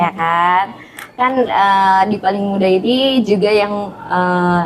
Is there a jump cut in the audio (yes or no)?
no